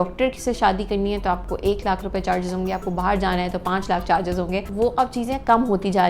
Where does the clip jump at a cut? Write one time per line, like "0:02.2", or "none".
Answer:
none